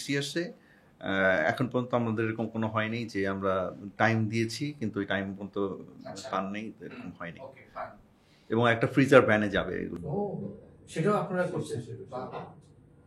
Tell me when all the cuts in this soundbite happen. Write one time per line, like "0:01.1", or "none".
none